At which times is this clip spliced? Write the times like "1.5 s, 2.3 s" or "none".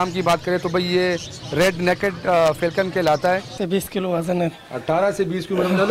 3.5 s